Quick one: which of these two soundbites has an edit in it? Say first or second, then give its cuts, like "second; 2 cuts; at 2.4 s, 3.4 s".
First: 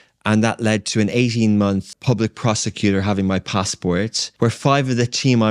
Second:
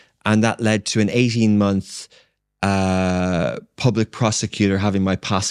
first; 2 cuts; at 1.9 s, 4.2 s